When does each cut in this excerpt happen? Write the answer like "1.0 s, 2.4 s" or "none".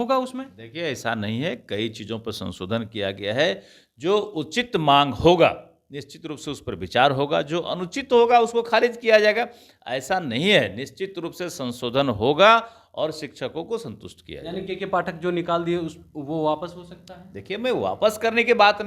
none

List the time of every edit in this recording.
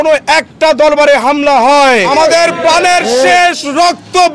2.1 s

